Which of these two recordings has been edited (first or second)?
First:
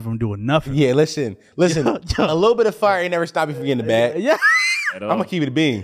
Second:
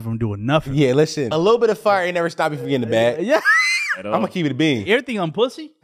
second